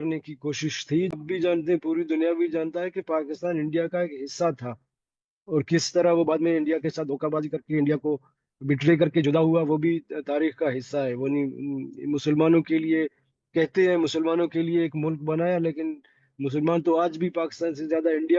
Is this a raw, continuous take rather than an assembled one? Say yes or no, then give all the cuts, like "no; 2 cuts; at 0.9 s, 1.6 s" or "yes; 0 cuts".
no; 1 cut; at 1.1 s